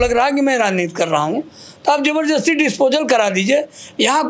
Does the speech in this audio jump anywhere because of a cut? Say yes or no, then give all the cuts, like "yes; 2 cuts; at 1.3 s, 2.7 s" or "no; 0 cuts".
no; 0 cuts